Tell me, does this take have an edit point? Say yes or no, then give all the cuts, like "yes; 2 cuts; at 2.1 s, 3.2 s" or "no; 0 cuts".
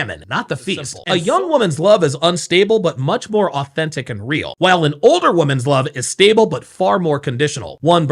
yes; 1 cut; at 0.9 s